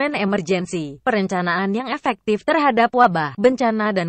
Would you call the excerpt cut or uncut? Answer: cut